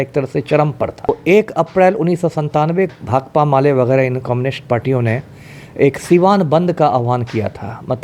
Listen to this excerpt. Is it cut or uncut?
cut